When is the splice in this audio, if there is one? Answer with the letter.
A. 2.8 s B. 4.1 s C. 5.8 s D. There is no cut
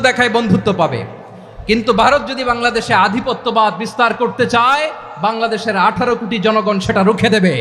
D